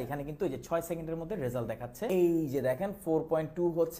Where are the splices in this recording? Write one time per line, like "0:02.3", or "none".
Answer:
0:02.1